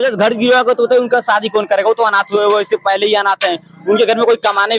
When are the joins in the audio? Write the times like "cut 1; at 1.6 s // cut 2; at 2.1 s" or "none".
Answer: none

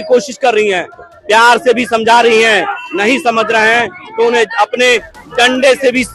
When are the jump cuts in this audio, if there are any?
none

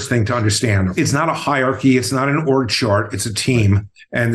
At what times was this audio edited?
cut 1; at 0.9 s

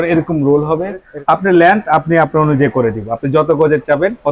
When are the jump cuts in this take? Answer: cut 1; at 1.1 s

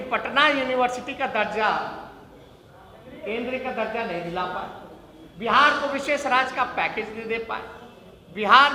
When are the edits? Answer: none

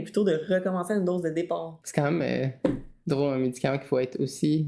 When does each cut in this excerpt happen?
cut 1; at 1.8 s

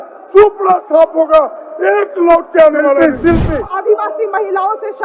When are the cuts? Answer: cut 1; at 3.4 s

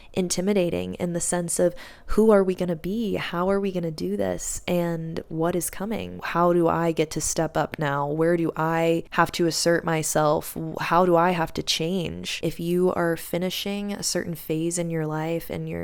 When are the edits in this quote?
cut 1; at 6.2 s // cut 2; at 9.1 s // cut 3; at 12.5 s

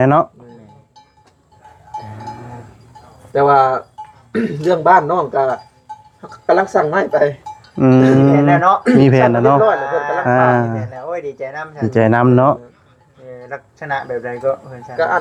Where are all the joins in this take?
none

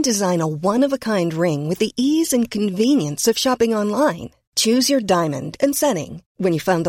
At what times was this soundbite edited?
none

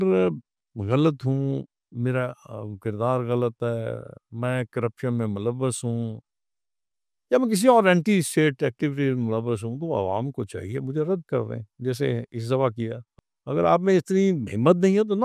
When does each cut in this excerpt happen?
cut 1; at 13.1 s

